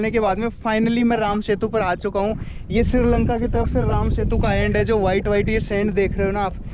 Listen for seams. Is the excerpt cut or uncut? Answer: uncut